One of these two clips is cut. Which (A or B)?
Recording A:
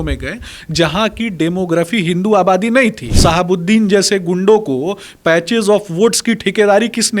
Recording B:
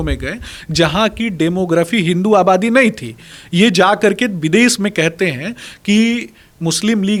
A